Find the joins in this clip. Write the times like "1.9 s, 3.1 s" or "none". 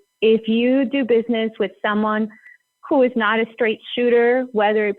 none

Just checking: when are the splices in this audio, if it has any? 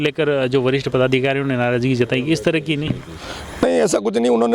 none

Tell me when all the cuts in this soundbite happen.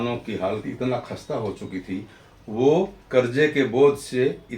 3.0 s

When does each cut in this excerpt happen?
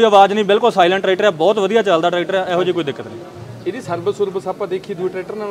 none

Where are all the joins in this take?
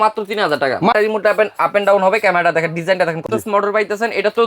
0.9 s, 3.2 s

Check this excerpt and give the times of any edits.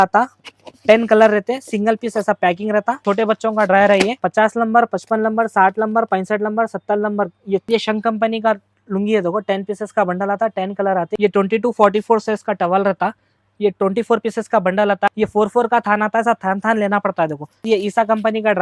2.9 s, 7.7 s, 11.1 s, 15.1 s, 17.7 s

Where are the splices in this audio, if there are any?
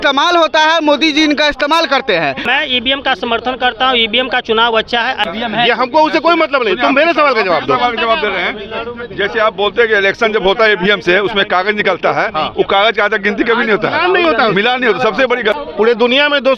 2.4 s, 5.2 s, 15.6 s

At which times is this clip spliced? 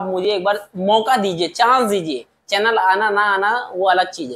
none

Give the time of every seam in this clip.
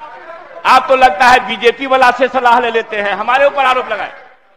none

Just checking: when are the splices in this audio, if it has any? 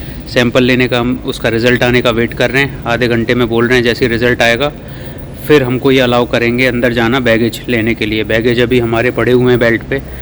none

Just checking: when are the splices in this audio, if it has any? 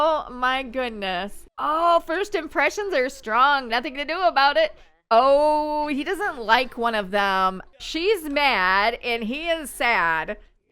1.4 s, 7.7 s

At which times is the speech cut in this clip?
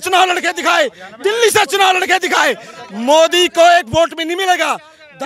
none

